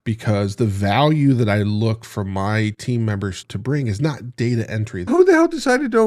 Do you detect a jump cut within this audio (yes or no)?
yes